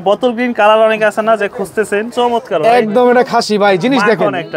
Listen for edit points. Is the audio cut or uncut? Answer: cut